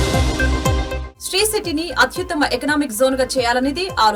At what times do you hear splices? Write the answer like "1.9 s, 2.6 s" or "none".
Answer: 1.0 s